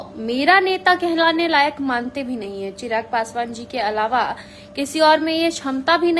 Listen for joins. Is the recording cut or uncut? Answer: uncut